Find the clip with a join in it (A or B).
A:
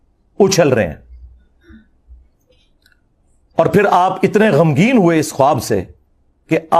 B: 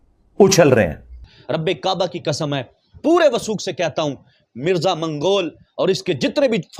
B